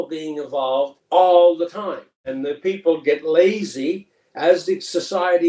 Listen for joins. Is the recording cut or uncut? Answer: cut